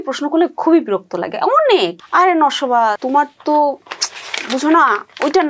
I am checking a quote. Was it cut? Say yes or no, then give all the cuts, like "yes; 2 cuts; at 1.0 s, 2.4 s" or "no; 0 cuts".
yes; 2 cuts; at 1.9 s, 3.0 s